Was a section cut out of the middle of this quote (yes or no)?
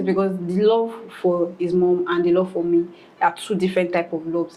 no